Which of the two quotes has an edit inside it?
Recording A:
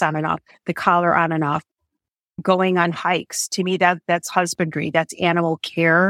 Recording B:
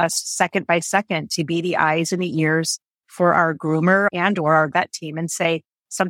B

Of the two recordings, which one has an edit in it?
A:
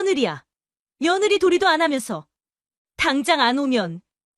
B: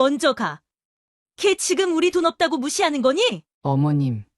B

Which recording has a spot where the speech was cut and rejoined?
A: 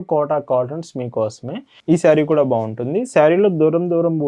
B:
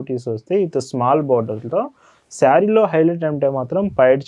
A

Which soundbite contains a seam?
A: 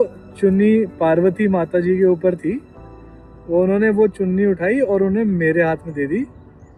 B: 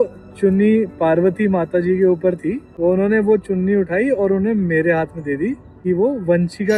B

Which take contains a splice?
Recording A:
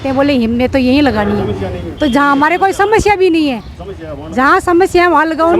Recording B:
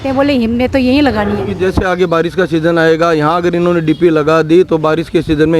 B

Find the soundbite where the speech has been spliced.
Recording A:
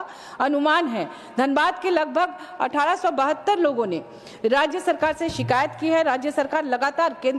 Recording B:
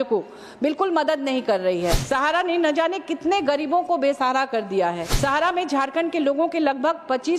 B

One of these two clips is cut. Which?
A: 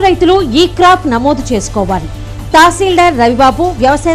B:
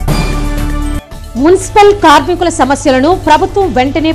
B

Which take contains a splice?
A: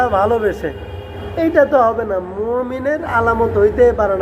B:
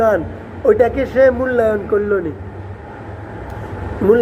A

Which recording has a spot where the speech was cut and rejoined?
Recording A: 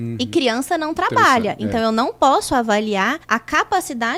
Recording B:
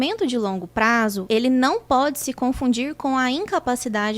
B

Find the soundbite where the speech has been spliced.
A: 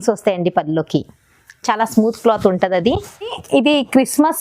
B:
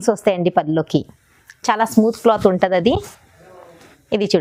A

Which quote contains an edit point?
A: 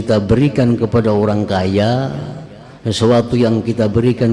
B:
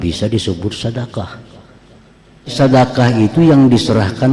B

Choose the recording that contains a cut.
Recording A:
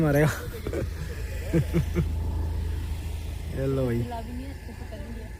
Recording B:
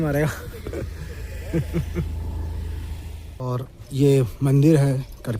B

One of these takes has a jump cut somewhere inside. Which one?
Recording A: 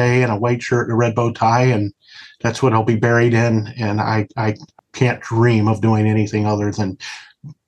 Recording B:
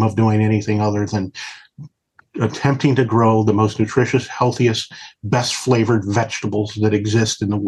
A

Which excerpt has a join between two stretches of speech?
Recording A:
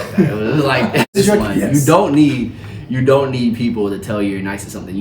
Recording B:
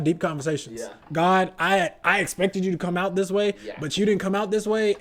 A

